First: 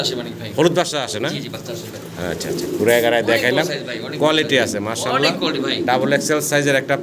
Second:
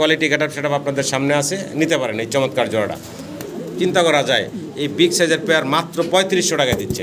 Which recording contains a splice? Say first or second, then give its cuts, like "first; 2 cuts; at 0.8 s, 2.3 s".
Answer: second; 1 cut; at 3.5 s